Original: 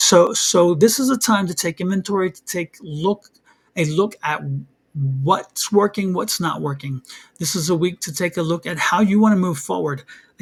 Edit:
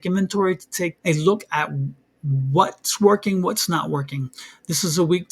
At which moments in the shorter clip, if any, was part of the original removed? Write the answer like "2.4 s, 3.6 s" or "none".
1.0 s